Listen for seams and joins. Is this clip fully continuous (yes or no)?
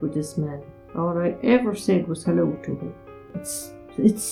yes